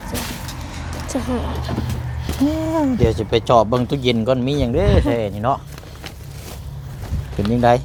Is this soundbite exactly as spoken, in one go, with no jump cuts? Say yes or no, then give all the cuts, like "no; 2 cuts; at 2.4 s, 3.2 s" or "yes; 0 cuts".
yes; 0 cuts